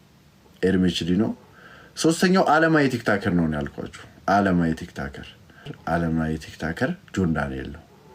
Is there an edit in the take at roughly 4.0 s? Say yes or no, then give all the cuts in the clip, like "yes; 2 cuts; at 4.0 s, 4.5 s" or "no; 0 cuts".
no; 1 cut; at 5.8 s